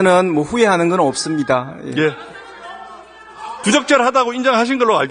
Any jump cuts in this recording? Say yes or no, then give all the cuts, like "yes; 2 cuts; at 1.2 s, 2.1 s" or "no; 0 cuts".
no; 0 cuts